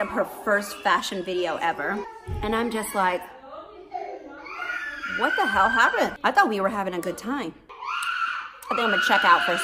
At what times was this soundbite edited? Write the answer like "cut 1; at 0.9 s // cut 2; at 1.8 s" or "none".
cut 1; at 2.2 s // cut 2; at 6.1 s // cut 3; at 7.7 s